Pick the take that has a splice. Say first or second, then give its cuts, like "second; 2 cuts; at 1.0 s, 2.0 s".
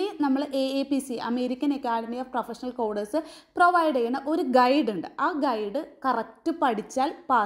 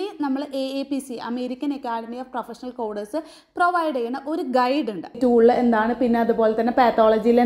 second; 1 cut; at 5.2 s